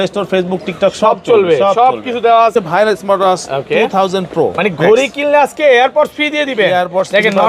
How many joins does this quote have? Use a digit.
1